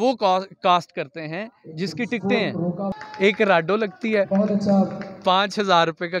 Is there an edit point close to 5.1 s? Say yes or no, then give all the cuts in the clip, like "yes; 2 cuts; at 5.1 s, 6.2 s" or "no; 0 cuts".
no; 1 cut; at 2.9 s